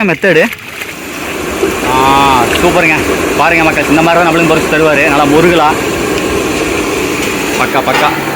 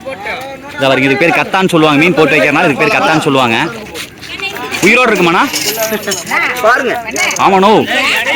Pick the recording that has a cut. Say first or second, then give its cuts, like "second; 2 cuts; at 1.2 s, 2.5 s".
first; 1 cut; at 1.5 s